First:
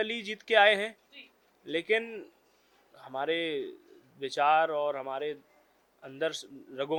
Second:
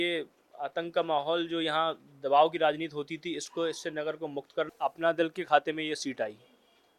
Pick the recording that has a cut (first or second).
second